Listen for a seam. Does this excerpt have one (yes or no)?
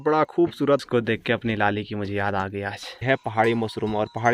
yes